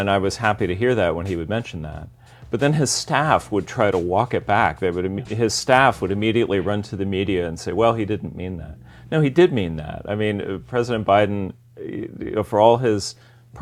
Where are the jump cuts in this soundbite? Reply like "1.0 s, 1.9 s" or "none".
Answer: none